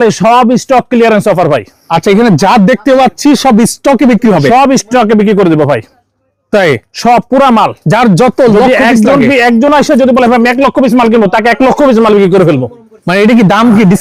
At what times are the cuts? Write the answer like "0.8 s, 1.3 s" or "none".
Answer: none